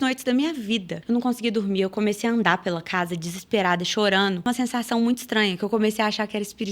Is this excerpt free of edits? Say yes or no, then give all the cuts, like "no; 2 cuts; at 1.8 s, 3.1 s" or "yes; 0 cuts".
no; 2 cuts; at 0.9 s, 4.5 s